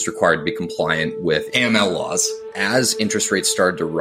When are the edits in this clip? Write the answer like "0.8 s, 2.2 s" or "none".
2.5 s